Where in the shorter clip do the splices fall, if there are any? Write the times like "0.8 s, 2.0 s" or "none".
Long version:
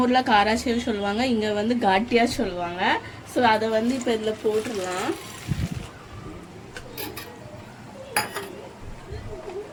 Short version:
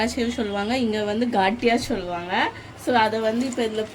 none